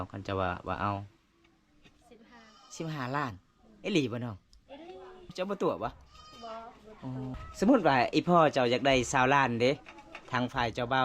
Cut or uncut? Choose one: cut